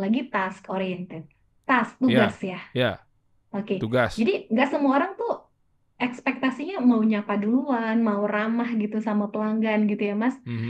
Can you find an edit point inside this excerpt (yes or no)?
no